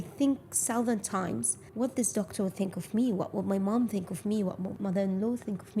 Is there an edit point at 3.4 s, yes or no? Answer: no